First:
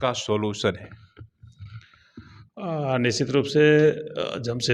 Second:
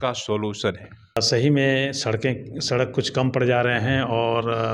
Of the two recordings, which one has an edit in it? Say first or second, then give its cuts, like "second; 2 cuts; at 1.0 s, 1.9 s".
second; 1 cut; at 1.2 s